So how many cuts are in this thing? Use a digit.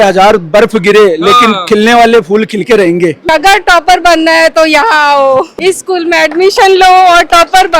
2